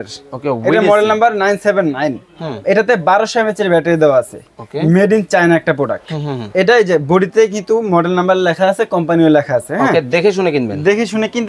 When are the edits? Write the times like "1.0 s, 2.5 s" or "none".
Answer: none